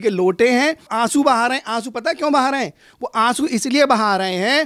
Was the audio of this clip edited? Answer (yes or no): yes